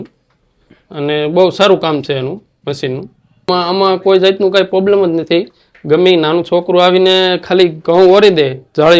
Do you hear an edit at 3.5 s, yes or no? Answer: yes